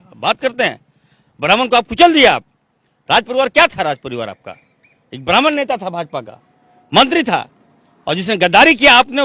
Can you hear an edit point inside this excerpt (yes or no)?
no